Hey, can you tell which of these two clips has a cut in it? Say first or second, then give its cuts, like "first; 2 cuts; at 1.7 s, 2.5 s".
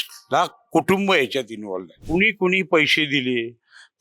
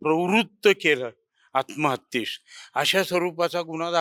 first; 1 cut; at 1.9 s